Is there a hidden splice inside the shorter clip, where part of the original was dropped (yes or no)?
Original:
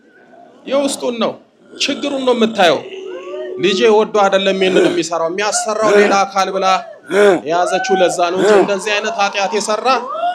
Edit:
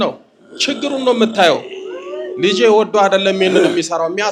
no